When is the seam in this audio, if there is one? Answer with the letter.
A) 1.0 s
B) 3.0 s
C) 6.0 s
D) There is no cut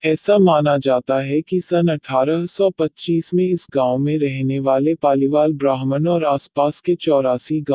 A